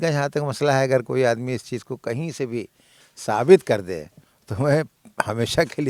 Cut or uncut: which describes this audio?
uncut